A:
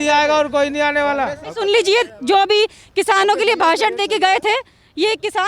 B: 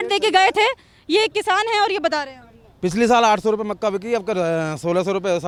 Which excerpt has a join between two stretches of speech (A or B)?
A